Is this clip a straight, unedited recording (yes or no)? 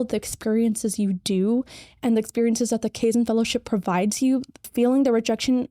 no